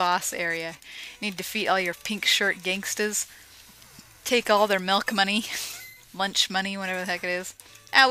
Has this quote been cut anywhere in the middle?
yes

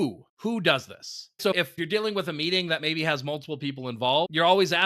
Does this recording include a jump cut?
yes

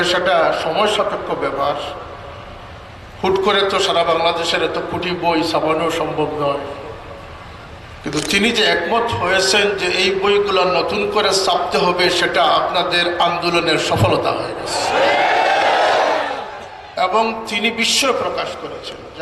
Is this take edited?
no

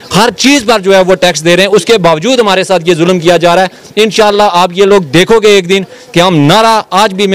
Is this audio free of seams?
yes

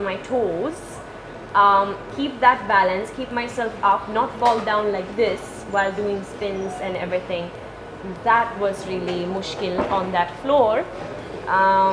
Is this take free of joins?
yes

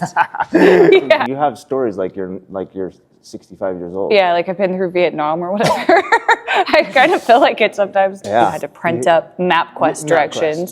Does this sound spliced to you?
yes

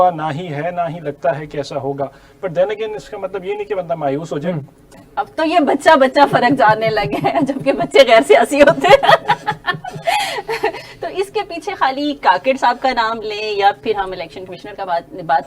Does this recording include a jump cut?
yes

